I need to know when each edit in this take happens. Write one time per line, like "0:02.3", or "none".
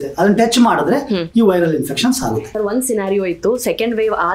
0:02.5